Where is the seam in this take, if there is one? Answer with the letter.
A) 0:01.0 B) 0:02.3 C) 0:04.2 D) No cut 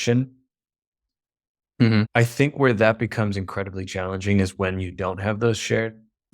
A